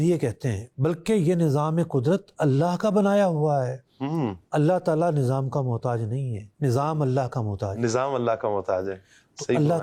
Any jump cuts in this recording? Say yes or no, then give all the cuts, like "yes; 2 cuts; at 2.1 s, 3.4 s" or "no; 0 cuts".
no; 0 cuts